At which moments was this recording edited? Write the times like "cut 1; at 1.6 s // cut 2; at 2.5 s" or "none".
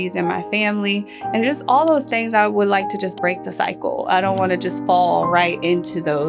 none